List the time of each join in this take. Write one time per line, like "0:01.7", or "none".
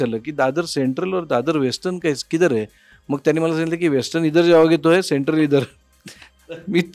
none